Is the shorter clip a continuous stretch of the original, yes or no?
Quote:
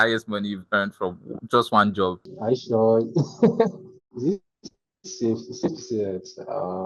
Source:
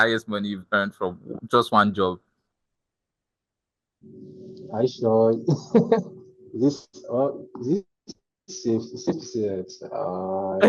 no